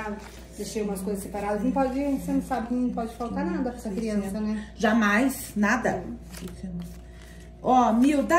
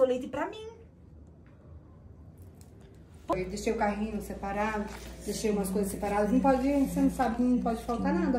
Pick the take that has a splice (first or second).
second